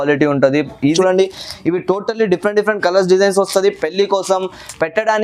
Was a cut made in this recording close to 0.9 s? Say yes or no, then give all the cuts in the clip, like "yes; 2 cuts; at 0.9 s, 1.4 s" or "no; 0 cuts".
yes; 1 cut; at 0.9 s